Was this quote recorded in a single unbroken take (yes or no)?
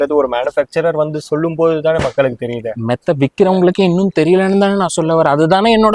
yes